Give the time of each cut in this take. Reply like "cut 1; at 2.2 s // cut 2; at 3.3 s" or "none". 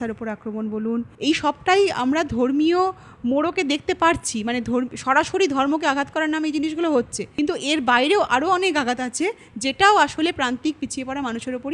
cut 1; at 1.1 s // cut 2; at 7.2 s